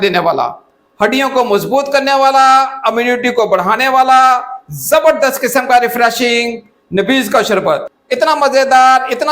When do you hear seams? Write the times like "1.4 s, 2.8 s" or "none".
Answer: 8.0 s